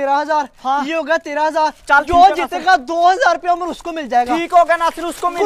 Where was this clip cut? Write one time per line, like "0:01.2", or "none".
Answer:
none